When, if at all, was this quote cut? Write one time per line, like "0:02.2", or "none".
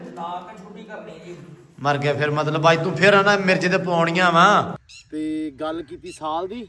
0:04.9